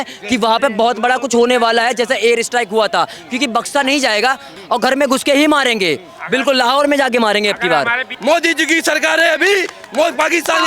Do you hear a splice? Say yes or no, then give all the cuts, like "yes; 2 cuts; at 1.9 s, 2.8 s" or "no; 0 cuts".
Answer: yes; 2 cuts; at 4.5 s, 8.1 s